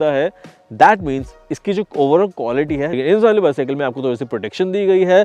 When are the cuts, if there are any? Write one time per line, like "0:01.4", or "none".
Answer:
0:02.9